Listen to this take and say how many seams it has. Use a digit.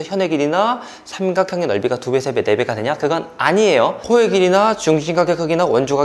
1